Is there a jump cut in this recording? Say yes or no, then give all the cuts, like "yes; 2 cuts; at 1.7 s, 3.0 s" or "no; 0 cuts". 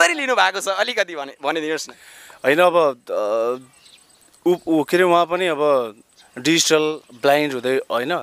no; 0 cuts